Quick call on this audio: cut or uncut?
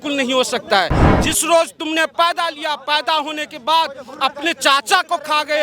cut